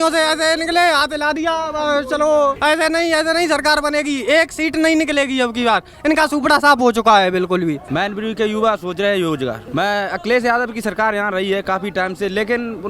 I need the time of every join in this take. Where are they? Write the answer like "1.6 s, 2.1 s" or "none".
2.6 s, 7.8 s, 9.6 s